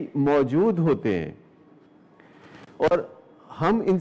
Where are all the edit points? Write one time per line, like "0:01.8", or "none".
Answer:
none